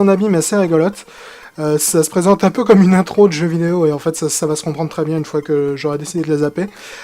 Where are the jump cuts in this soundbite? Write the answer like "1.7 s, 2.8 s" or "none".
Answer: 4.3 s